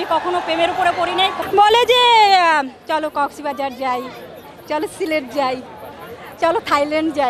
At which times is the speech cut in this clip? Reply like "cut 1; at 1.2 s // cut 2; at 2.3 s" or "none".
cut 1; at 1.4 s